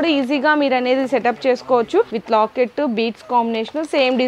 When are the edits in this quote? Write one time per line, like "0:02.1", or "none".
0:02.2